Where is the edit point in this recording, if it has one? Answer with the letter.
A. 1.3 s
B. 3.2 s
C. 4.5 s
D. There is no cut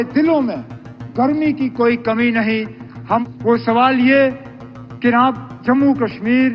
B